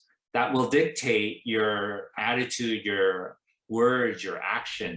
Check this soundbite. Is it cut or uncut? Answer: cut